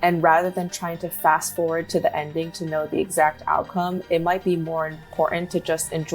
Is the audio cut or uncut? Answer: uncut